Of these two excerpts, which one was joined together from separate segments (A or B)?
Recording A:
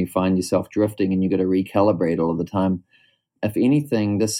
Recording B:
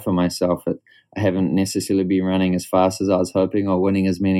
A